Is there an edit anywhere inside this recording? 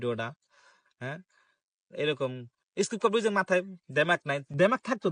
no; 0 cuts

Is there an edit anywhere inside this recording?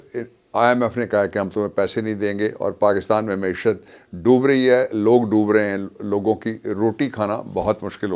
no; 0 cuts

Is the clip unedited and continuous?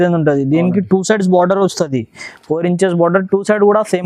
yes; 0 cuts

